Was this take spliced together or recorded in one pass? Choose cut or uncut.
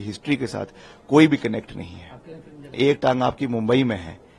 cut